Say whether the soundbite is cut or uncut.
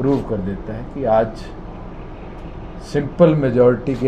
uncut